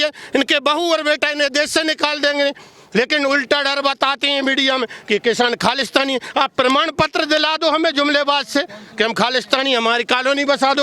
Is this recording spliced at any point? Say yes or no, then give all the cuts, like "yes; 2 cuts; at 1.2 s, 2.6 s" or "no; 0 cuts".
no; 0 cuts